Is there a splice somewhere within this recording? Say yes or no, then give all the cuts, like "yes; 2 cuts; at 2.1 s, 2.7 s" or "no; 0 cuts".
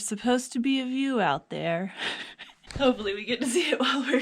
yes; 1 cut; at 2.6 s